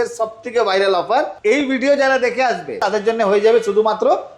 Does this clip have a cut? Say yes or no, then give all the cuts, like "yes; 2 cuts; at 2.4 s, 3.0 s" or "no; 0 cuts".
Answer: yes; 2 cuts; at 1.3 s, 2.8 s